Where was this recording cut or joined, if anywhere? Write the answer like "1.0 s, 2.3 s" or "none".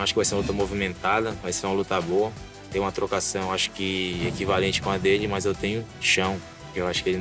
2.6 s, 6.0 s